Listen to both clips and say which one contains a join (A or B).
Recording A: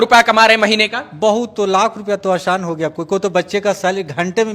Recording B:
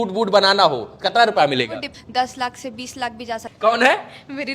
B